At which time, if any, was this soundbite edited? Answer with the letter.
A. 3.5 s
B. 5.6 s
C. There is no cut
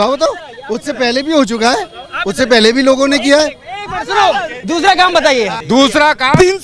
B